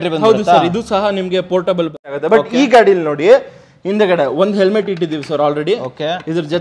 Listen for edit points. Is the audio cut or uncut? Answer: cut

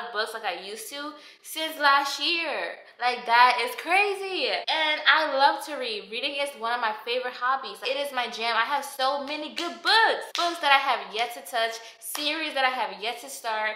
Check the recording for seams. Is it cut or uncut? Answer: uncut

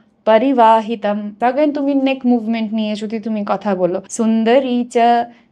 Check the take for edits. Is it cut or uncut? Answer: cut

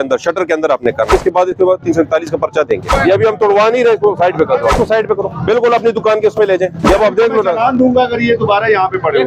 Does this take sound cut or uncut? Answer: cut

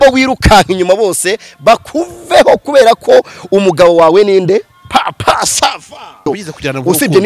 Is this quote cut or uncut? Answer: cut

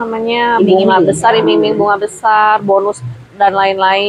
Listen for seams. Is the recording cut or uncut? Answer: uncut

